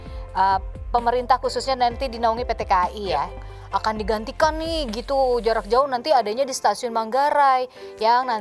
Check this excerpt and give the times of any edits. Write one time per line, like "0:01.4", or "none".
0:03.4